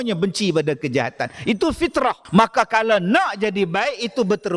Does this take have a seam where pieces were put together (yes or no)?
yes